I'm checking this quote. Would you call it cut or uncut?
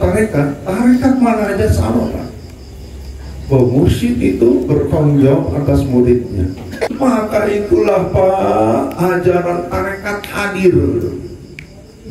cut